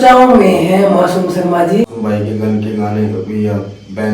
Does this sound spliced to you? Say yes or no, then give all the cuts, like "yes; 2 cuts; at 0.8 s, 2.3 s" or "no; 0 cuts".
yes; 1 cut; at 1.8 s